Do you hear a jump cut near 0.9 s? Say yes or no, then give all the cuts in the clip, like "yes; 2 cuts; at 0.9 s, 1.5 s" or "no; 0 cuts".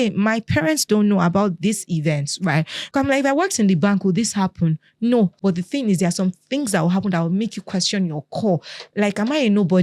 no; 2 cuts; at 2.8 s, 5.4 s